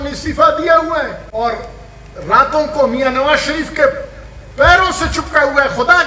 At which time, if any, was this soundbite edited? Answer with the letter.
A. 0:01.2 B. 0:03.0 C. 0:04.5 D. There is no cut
A